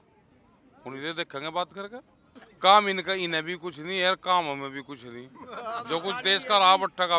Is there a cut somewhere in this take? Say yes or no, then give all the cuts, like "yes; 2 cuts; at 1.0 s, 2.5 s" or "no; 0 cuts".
yes; 1 cut; at 2.5 s